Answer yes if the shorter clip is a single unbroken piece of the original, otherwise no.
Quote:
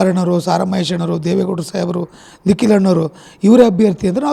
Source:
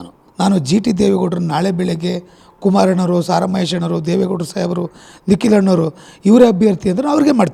yes